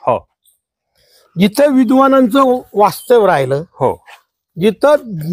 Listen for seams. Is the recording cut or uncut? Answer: uncut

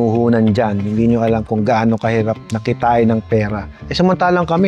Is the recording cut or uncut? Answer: uncut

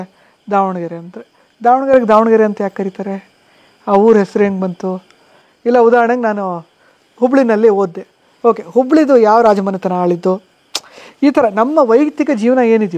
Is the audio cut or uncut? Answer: uncut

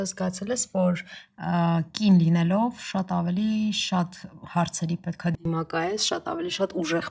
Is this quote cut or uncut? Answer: uncut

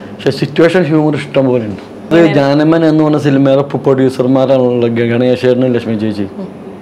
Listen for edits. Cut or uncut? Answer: cut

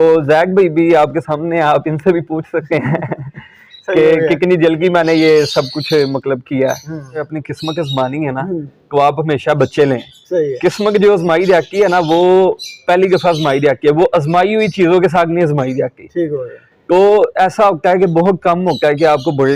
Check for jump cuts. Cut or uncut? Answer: cut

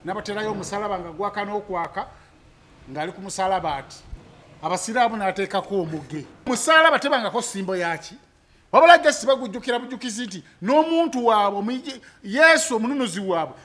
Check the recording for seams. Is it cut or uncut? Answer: cut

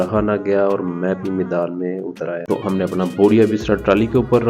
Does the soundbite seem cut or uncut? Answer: cut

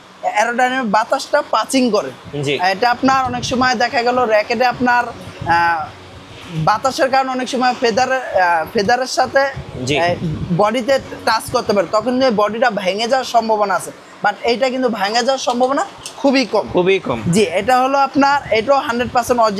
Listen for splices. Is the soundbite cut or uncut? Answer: uncut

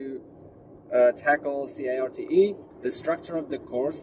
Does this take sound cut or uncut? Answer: cut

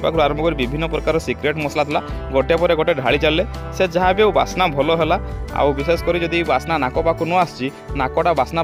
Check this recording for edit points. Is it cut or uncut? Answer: uncut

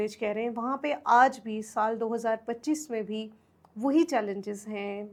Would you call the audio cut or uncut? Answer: uncut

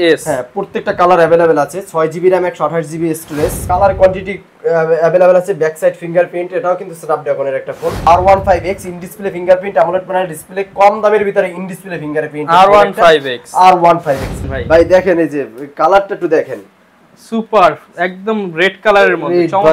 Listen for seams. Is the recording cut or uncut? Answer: cut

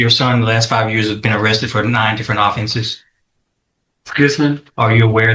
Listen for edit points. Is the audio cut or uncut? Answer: uncut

